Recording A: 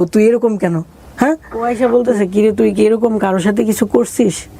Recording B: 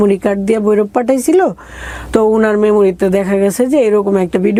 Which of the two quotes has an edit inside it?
A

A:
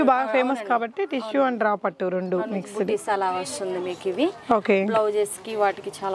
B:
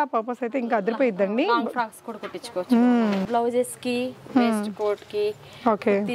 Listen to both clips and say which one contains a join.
B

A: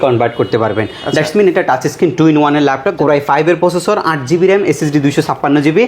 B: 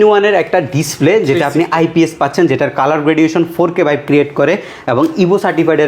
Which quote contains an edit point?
A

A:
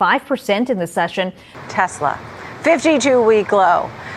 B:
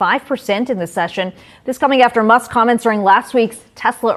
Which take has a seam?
A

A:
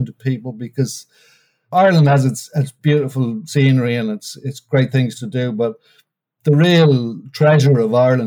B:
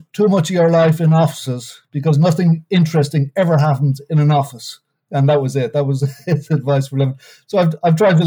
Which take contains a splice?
A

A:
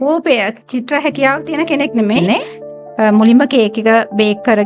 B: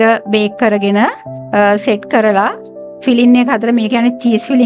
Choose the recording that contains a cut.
A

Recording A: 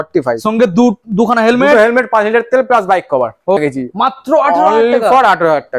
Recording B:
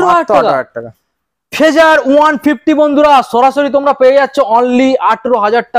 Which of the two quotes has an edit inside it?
A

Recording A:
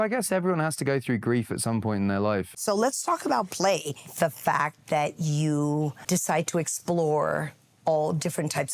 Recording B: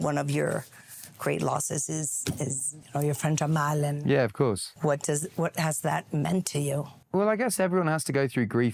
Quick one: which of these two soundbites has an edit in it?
A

